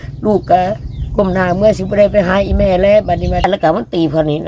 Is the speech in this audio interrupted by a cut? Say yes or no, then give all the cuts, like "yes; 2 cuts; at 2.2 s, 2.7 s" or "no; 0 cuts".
yes; 1 cut; at 3.4 s